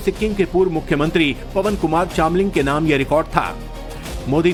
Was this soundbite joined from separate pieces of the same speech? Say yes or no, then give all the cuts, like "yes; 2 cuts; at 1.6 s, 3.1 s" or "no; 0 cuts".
no; 0 cuts